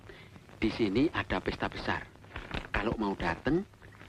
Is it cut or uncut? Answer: uncut